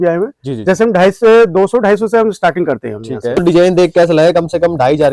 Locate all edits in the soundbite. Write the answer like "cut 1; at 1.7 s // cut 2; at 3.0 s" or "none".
cut 1; at 3.4 s